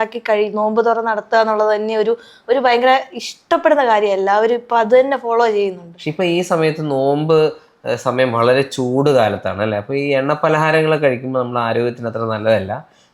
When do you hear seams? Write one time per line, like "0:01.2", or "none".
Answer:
none